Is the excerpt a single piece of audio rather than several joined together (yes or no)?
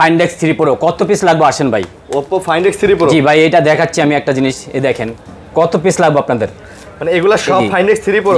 yes